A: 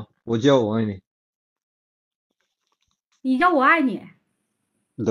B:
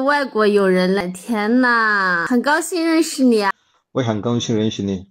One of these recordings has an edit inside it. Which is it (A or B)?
B